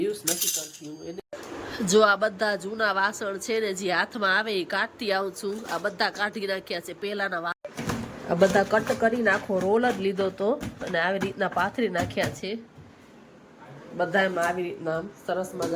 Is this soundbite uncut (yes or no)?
no